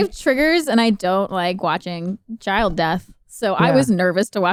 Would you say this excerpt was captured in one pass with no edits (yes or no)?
yes